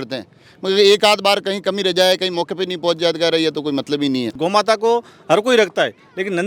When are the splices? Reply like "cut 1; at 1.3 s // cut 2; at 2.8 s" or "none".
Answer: cut 1; at 4.3 s